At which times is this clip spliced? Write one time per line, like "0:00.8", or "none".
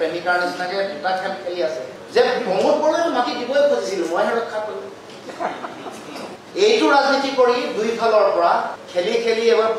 0:06.4
0:08.8